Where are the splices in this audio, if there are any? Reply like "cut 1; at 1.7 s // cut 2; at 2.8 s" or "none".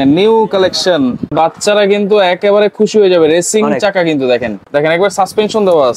cut 1; at 1.3 s // cut 2; at 4.6 s